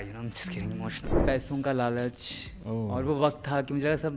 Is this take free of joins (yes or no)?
no